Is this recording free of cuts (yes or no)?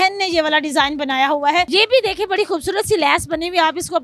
no